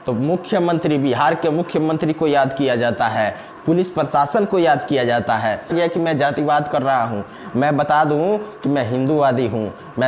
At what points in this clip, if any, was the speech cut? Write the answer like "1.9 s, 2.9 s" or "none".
5.7 s